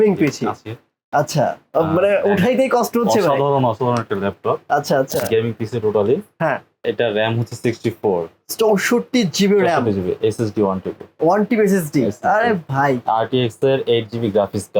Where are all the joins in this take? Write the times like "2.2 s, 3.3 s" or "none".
6.7 s